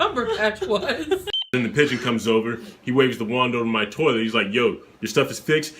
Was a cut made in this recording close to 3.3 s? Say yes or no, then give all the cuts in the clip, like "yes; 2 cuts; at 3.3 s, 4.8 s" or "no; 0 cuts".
no; 1 cut; at 1.3 s